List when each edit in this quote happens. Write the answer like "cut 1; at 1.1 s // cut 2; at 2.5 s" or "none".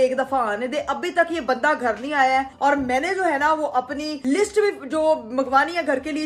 none